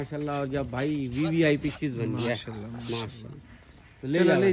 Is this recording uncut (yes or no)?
yes